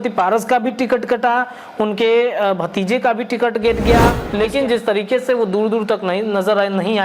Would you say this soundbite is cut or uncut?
cut